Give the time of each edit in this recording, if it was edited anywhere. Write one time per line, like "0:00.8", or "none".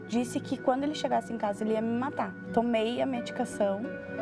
0:02.4